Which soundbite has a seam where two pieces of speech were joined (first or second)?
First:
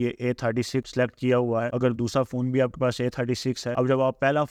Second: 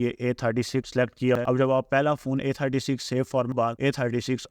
second